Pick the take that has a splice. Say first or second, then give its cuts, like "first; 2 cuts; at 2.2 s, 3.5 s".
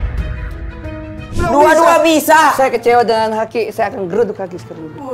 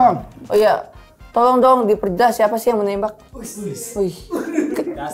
first; 1 cut; at 1.4 s